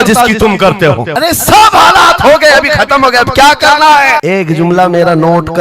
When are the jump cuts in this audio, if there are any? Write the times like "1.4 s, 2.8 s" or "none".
none